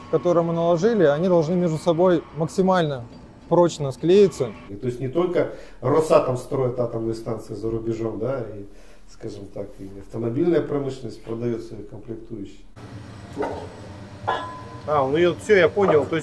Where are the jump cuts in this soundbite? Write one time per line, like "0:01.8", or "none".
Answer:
0:04.6
0:12.8